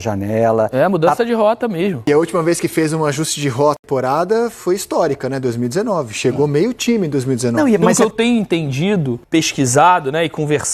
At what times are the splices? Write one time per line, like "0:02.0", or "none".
0:02.1
0:03.8
0:07.9
0:09.2

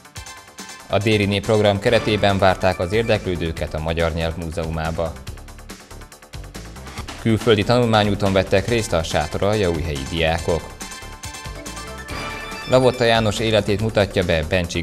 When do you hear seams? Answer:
0:00.9
0:05.1
0:07.0
0:10.7
0:12.7

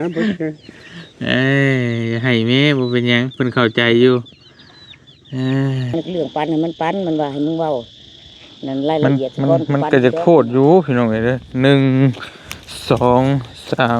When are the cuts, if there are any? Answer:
0:05.9

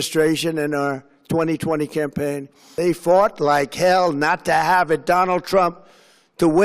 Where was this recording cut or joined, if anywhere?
0:02.7

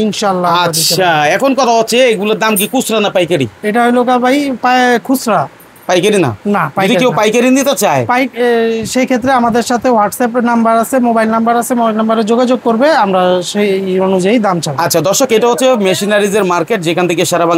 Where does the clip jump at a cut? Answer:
none

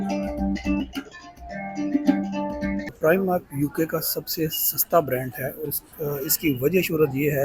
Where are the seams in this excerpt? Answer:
0:02.9

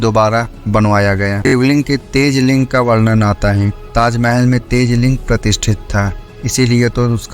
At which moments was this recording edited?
0:01.5

